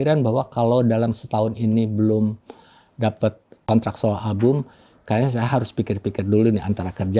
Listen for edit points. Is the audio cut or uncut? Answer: cut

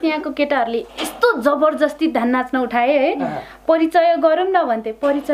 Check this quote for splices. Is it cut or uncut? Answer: uncut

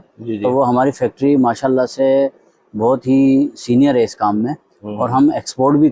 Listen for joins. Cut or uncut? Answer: uncut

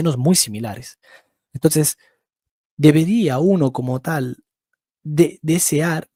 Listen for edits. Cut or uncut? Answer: uncut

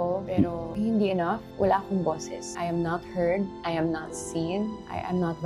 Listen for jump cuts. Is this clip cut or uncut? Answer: cut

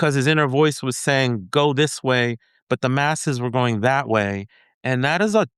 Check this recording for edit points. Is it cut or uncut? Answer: uncut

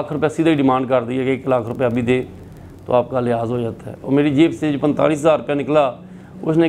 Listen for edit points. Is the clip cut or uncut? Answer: uncut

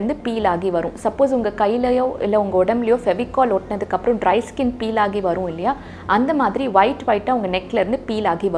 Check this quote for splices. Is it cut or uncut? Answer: uncut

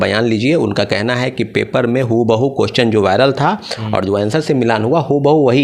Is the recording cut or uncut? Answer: uncut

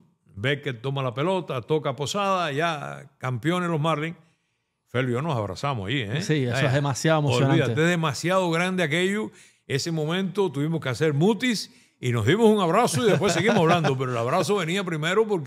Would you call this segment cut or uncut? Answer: uncut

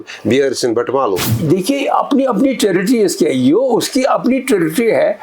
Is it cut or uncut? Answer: cut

